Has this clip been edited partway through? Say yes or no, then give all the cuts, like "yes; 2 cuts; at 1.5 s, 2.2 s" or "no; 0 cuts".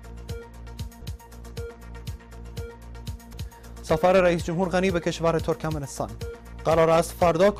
no; 0 cuts